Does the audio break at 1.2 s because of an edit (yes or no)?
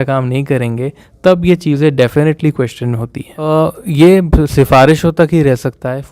no